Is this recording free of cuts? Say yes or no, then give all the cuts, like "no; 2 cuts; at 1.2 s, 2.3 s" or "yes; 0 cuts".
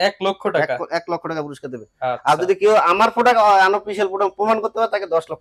yes; 0 cuts